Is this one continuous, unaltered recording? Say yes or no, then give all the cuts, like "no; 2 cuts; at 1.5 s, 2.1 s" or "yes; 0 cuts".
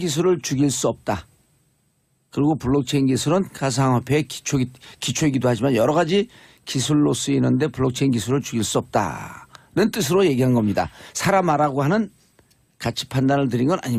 yes; 0 cuts